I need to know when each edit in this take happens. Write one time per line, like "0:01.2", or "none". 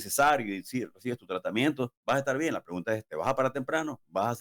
none